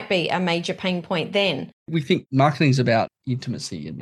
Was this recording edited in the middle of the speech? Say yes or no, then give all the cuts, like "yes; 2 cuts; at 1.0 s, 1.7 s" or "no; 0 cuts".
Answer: yes; 2 cuts; at 1.8 s, 3.1 s